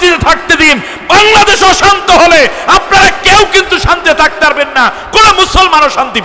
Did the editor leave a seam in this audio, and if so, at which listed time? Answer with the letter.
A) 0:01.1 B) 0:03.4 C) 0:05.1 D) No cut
D